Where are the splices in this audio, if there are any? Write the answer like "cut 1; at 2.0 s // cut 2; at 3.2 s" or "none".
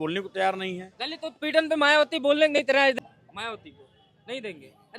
cut 1; at 2.9 s